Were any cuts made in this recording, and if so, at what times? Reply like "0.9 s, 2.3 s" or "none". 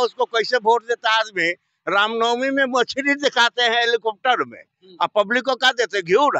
none